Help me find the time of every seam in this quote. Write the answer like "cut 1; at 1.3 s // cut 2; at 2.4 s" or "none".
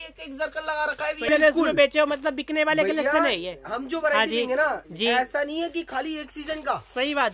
cut 1; at 1.3 s